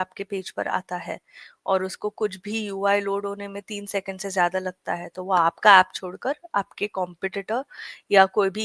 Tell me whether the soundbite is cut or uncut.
uncut